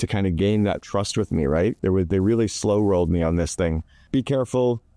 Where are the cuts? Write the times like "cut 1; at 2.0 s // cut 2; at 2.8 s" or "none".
cut 1; at 4.0 s